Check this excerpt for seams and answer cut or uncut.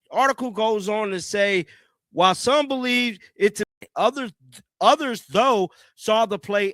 cut